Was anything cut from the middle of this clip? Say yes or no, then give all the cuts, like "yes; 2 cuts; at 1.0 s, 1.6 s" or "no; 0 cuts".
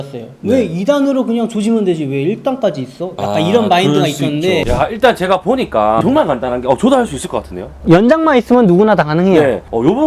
yes; 3 cuts; at 4.6 s, 6.0 s, 7.7 s